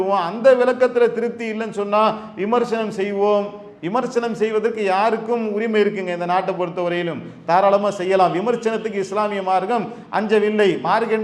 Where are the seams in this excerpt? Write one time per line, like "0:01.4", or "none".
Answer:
none